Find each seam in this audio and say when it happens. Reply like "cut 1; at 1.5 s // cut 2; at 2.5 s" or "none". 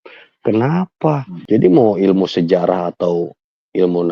cut 1; at 1.3 s